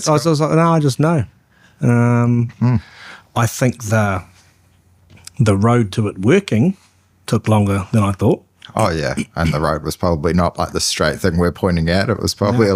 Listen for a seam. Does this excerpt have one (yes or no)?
no